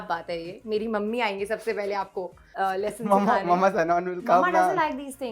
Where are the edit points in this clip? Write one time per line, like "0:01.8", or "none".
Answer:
0:02.4